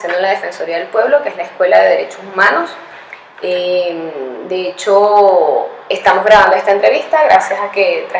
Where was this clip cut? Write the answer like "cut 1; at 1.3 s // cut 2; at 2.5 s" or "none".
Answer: cut 1; at 2.9 s